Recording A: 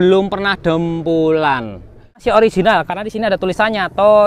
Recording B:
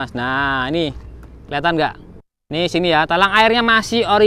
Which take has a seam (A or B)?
A